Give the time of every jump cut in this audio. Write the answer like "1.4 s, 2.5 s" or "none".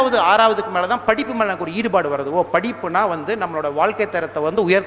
none